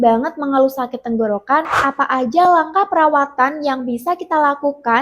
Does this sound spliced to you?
yes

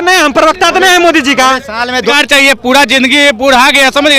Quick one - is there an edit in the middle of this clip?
yes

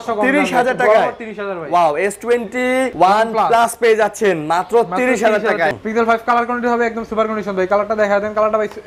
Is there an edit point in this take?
yes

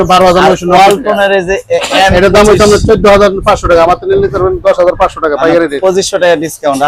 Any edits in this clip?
no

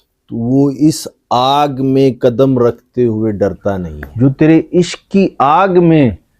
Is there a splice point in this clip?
yes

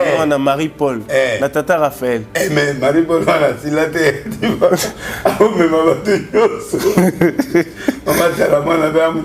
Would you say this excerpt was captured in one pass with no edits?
yes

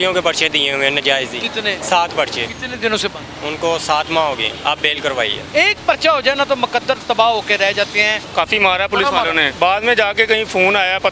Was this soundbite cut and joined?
yes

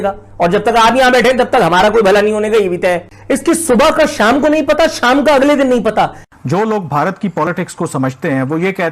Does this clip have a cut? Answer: yes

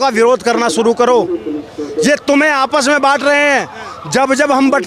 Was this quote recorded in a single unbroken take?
yes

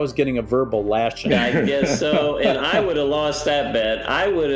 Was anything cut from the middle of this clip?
yes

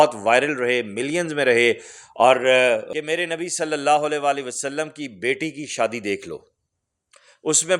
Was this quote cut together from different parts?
yes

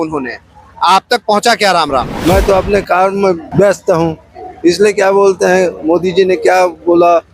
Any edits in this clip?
yes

